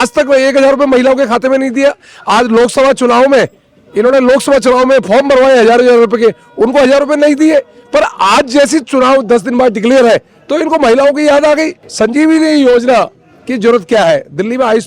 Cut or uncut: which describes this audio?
cut